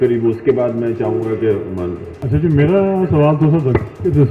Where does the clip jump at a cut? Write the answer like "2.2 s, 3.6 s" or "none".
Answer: 2.1 s